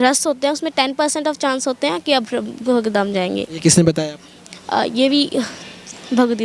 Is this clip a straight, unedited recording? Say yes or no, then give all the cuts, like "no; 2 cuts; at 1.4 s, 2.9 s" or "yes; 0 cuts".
yes; 0 cuts